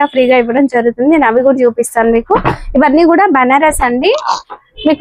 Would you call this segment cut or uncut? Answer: uncut